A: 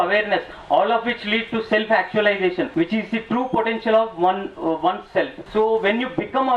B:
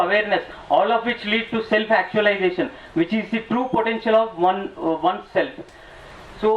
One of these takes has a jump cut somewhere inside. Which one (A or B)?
A